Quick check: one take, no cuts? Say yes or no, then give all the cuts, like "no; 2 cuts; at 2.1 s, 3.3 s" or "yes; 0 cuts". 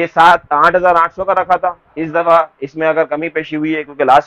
yes; 0 cuts